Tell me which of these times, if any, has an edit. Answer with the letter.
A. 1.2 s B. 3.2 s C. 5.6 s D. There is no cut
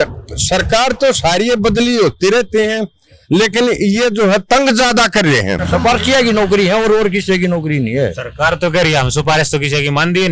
C